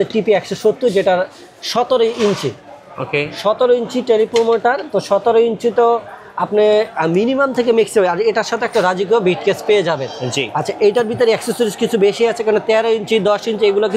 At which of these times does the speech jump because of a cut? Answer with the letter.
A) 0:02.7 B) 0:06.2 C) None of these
C